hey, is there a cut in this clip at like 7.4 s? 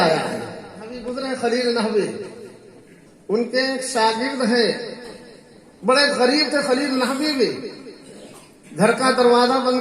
no; 1 cut; at 1.0 s

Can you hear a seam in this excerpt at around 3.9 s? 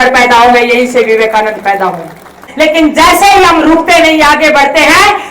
no; 1 cut; at 2.4 s

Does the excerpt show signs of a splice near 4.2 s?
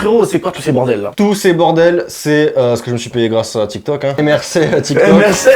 yes; 2 cuts; at 1.1 s, 4.2 s

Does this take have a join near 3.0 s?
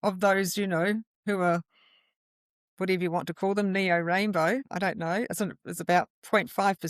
no; 2 cuts; at 1.1 s, 4.7 s

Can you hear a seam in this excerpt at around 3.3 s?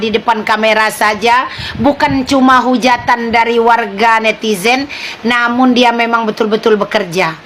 no; 0 cuts

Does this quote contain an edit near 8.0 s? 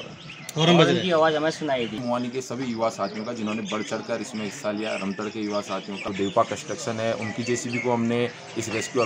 no; 2 cuts; at 2.0 s, 6.0 s

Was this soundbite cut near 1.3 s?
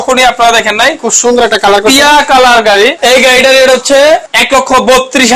no; 2 cuts; at 3.0 s, 4.3 s

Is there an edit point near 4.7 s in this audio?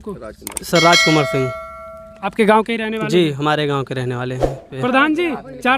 yes; 1 cut; at 4.7 s

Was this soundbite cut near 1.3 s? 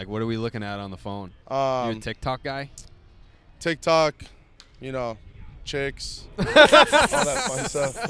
yes; 1 cut; at 1.3 s

